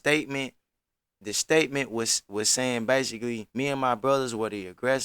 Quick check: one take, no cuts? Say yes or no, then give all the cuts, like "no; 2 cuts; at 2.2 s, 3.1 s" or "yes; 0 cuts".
no; 1 cut; at 3.5 s